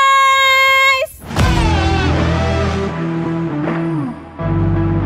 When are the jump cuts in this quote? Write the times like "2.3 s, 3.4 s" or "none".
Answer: none